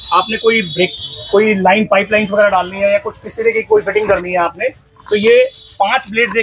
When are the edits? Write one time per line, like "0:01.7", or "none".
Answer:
none